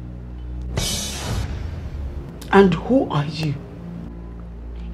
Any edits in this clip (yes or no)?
no